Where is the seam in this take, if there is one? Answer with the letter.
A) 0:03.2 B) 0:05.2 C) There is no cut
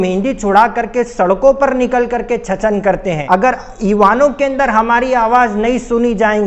A